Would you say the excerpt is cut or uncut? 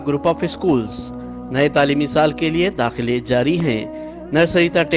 uncut